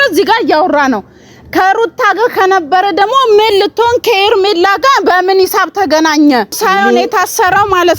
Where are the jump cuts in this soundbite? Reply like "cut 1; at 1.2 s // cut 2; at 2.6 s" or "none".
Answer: cut 1; at 6.6 s